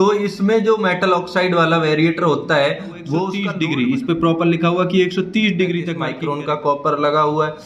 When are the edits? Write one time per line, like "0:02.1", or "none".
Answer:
0:03.4
0:06.0